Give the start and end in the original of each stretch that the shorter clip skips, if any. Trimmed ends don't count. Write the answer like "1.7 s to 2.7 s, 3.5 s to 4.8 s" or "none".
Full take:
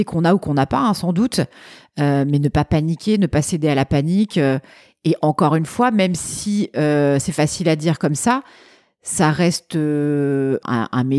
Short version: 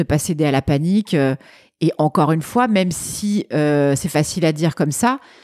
none